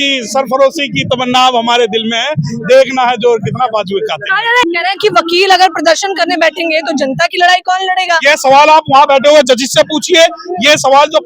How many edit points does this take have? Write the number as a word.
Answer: one